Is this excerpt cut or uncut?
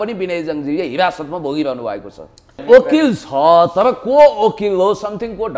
cut